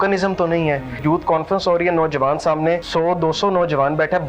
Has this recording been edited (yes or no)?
yes